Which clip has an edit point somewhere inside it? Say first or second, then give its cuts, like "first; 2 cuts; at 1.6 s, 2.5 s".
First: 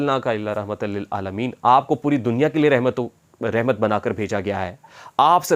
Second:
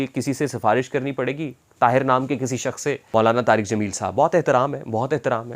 second; 1 cut; at 3.0 s